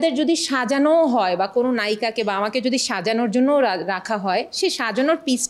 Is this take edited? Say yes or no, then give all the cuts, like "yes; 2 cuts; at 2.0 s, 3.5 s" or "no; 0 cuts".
no; 0 cuts